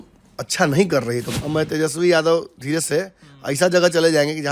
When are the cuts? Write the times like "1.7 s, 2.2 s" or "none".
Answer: 1.3 s